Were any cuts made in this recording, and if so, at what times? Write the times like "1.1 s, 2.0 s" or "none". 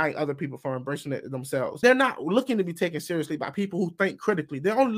1.8 s